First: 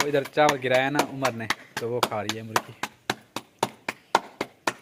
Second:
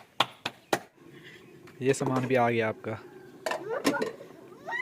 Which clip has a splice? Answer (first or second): second